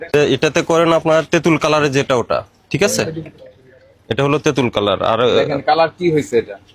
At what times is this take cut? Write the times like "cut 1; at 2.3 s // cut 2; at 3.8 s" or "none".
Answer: none